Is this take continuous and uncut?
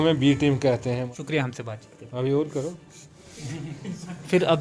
no; 1 cut; at 1.0 s

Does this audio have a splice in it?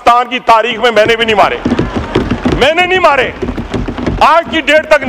no; 0 cuts

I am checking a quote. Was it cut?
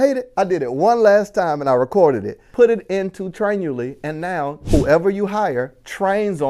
yes; 2 cuts; at 2.4 s, 4.6 s

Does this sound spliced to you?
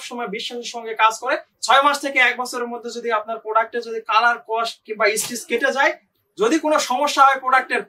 yes; 2 cuts; at 1.5 s, 6.1 s

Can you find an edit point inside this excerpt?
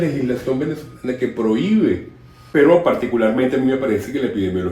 yes; 1 cut; at 2.4 s

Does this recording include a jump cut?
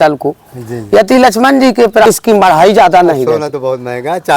yes; 1 cut; at 2.1 s

